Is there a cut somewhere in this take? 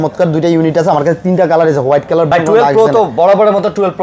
yes; 1 cut; at 2.3 s

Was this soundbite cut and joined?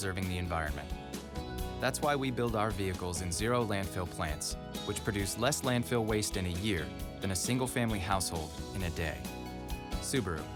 no; 0 cuts

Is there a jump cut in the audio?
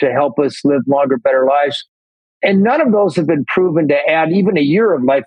yes; 1 cut; at 2.4 s

